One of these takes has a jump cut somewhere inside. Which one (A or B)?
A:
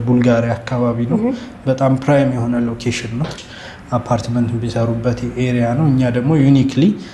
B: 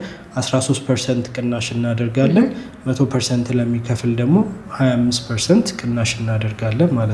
A